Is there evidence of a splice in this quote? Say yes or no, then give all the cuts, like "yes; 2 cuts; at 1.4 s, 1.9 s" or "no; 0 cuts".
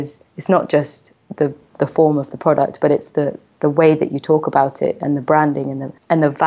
no; 0 cuts